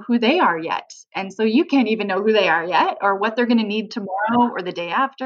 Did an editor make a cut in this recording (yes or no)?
no